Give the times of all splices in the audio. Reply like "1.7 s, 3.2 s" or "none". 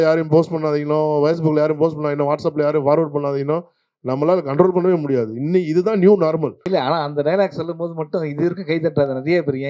6.6 s